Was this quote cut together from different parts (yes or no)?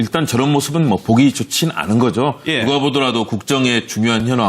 yes